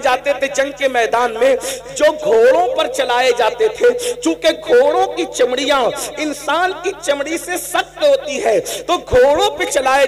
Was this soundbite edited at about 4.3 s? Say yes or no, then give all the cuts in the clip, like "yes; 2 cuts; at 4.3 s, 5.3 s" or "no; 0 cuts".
no; 0 cuts